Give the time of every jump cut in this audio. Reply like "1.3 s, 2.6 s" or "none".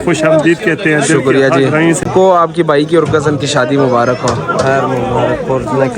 2.0 s